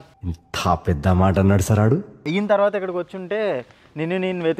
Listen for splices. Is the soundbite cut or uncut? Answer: cut